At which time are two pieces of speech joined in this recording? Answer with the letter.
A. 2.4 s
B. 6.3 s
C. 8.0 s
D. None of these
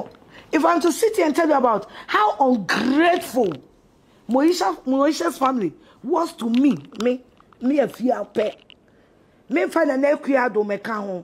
D